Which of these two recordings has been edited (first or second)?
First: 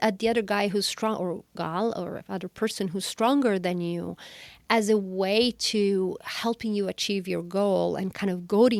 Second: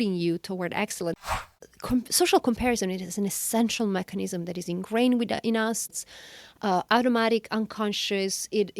second